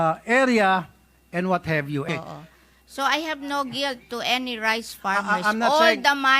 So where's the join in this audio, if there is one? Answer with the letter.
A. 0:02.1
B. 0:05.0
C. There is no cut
A